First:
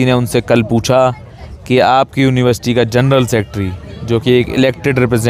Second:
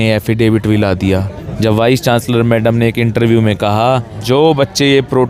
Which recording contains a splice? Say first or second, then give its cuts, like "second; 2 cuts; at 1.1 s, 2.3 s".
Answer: second; 2 cuts; at 1.4 s, 4.1 s